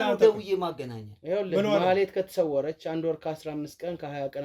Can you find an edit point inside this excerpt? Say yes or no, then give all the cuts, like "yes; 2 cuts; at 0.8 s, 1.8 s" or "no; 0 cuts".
no; 0 cuts